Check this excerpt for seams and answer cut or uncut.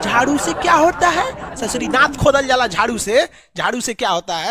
uncut